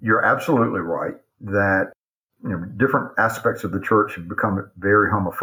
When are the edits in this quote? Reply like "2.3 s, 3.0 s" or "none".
1.9 s